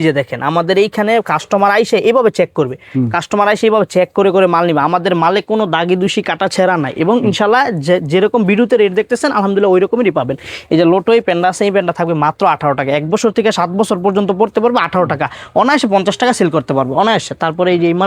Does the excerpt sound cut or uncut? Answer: uncut